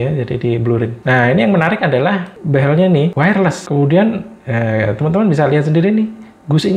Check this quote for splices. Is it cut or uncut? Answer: uncut